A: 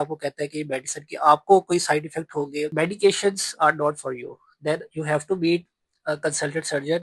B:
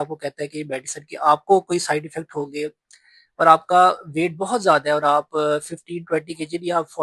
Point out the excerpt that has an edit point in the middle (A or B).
A